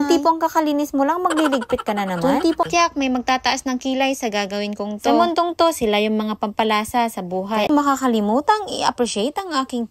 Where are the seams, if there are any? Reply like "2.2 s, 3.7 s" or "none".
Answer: 2.7 s, 7.7 s